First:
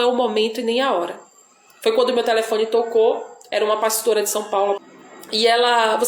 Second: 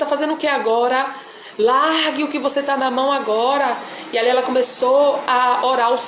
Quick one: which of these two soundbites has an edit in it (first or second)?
first